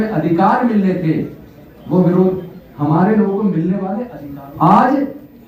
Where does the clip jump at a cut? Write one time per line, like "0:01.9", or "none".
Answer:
0:04.1